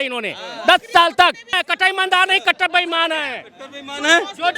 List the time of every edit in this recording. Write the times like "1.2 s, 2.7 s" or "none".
1.6 s